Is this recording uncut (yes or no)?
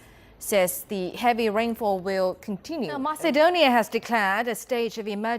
no